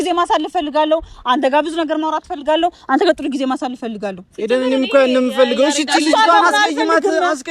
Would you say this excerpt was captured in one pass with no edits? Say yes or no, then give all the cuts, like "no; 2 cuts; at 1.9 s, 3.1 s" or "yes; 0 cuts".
yes; 0 cuts